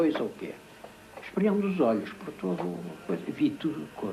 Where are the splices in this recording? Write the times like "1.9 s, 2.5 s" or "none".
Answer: 2.3 s